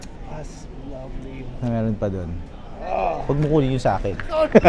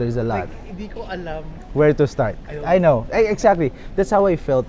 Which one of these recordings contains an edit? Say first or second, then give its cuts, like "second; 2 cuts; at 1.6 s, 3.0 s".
second; 1 cut; at 1.6 s